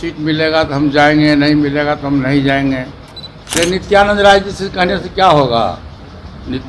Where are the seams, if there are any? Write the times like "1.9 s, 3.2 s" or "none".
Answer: 3.5 s

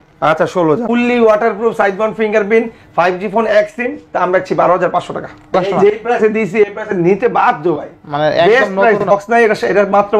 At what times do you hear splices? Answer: 0.8 s, 5.5 s, 9.0 s

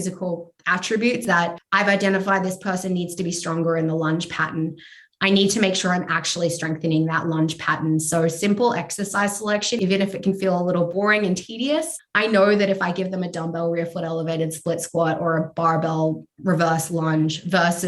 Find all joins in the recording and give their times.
1.2 s, 9.8 s, 10.9 s, 12.0 s

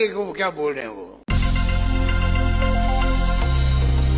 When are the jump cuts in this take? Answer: 1.1 s

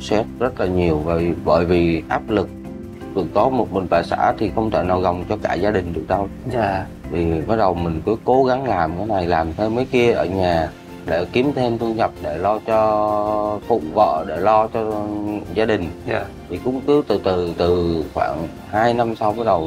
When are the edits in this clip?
none

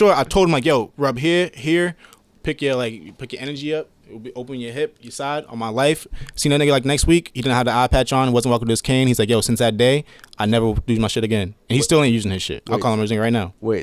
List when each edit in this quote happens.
0.9 s

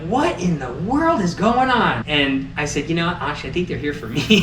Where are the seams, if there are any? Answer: 2.4 s

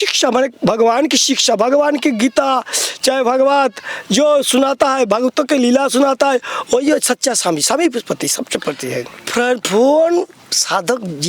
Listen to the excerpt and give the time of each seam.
9.3 s

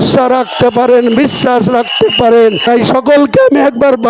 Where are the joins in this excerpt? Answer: 2.6 s

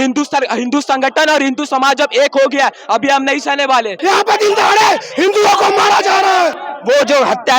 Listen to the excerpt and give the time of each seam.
3.9 s, 6.7 s

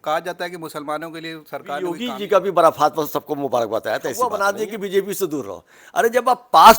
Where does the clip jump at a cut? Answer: 1.9 s, 4.3 s

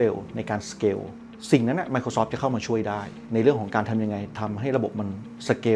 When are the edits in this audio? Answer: 1.2 s

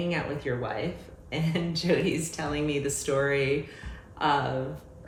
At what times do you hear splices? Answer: none

